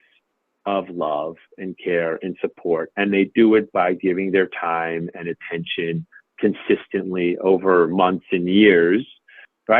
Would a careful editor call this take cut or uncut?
uncut